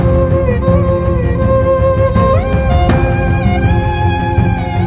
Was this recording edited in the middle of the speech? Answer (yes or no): no